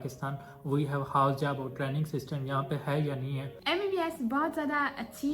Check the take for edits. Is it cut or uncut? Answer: cut